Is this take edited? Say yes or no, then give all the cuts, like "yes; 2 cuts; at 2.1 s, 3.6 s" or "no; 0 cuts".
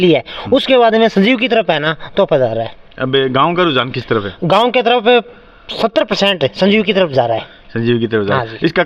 no; 0 cuts